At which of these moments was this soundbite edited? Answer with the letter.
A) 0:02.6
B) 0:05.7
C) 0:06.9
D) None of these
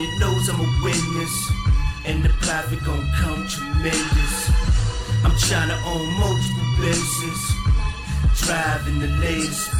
D